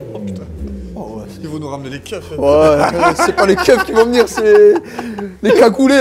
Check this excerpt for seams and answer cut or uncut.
uncut